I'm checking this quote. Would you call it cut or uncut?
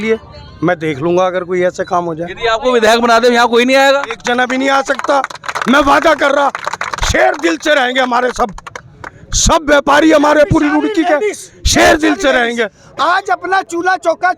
uncut